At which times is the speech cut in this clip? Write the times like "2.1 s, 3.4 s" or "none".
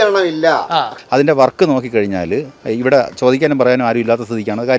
1.0 s